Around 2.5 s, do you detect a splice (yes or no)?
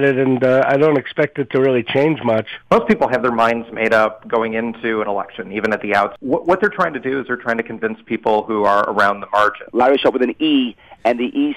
yes